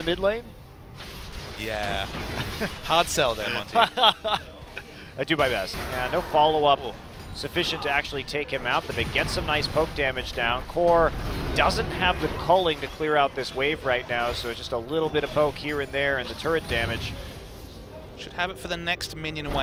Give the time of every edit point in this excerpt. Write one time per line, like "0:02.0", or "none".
none

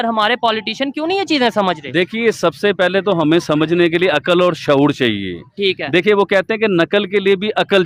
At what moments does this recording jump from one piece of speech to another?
none

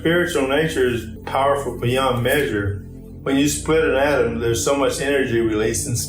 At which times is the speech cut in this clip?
0:01.1
0:03.1

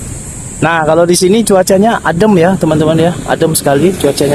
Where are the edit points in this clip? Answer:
none

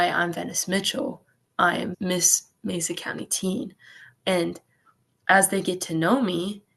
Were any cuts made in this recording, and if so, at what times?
0:01.9

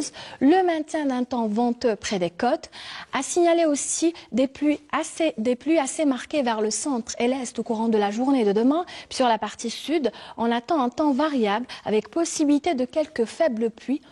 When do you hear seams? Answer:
0:11.3

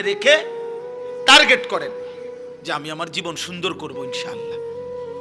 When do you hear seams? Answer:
0:04.0

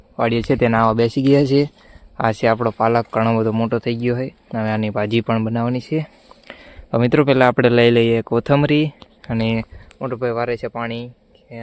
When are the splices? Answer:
none

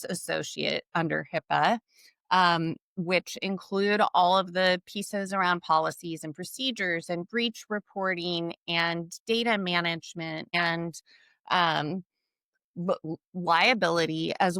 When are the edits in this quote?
0:10.5

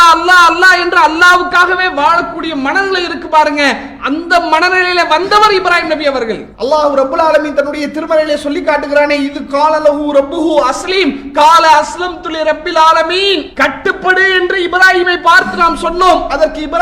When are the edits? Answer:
0:06.5
0:13.5

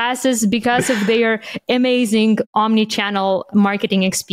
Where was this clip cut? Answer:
0:02.5

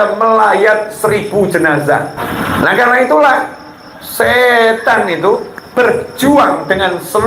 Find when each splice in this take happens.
0:02.1

